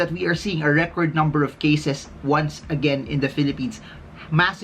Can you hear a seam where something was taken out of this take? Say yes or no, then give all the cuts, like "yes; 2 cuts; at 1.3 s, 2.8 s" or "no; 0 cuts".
no; 0 cuts